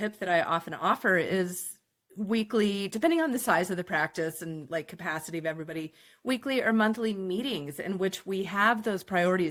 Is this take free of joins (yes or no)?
yes